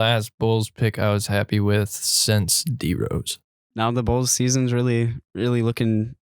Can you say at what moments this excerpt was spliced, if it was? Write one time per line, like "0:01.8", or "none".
0:03.6